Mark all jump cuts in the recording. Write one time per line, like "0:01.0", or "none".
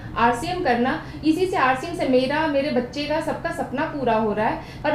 none